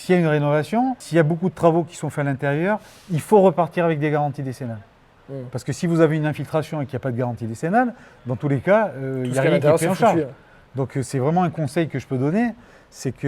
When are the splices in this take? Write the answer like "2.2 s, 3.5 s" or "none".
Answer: 1.0 s